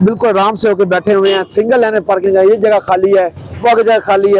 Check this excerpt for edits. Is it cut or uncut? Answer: uncut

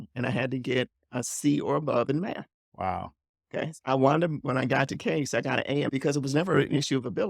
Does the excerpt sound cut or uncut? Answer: cut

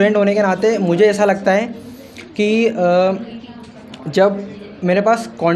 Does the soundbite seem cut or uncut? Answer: uncut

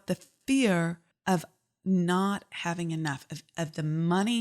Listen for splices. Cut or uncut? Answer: cut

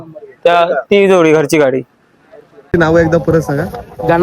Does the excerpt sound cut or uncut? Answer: cut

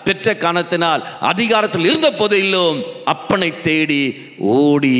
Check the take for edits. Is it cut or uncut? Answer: uncut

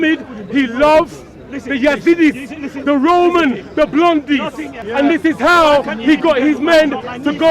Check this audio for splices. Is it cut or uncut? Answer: cut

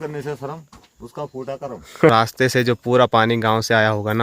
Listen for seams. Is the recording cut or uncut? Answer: cut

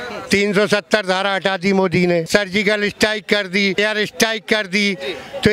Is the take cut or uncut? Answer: cut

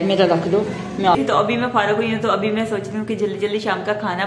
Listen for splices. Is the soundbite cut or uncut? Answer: cut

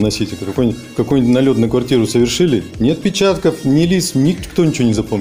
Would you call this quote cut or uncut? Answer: uncut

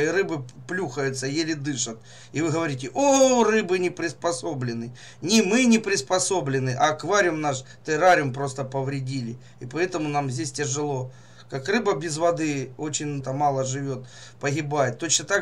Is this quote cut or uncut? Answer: cut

